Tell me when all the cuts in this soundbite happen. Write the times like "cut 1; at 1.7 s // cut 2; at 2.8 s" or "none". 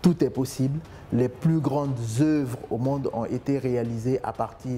none